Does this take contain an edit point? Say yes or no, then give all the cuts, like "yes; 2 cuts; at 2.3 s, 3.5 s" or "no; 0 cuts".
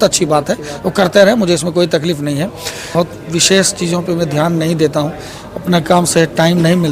yes; 1 cut; at 2.9 s